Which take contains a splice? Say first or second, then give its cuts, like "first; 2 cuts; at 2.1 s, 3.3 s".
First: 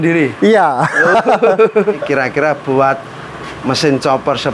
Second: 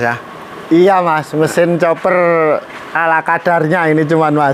first; 1 cut; at 2.0 s